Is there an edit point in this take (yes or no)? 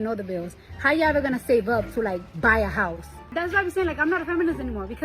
yes